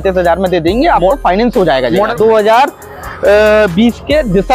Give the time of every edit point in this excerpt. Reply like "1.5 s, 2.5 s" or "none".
2.1 s